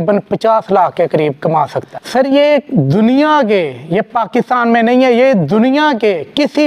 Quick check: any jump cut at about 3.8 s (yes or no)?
no